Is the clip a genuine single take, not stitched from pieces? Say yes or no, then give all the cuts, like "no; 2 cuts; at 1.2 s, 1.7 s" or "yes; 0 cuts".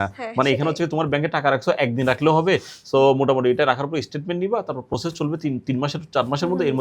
yes; 0 cuts